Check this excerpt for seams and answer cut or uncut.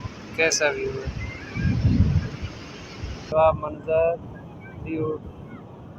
cut